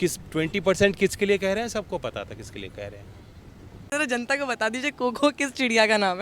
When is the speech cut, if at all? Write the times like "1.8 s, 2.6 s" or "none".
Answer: 3.9 s

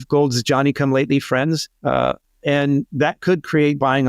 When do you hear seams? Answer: 1.7 s

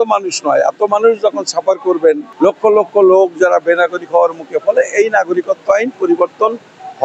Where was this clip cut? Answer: 2.3 s

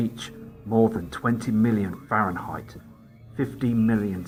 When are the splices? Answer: none

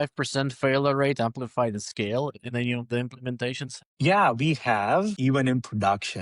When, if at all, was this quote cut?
3.7 s, 5.2 s

